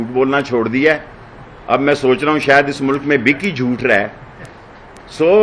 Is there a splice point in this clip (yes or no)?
no